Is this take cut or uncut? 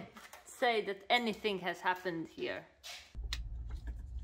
cut